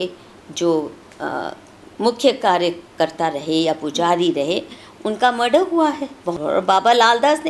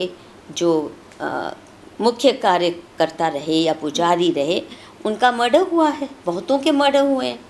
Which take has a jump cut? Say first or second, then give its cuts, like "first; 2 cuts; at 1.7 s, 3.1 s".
first; 1 cut; at 6.3 s